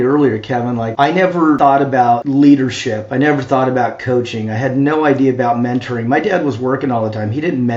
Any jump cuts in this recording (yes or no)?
yes